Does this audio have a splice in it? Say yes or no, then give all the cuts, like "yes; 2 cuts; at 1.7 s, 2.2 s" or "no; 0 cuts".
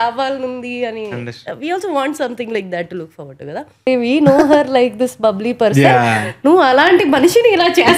yes; 1 cut; at 3.9 s